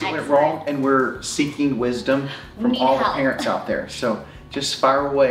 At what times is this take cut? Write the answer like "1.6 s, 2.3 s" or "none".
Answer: none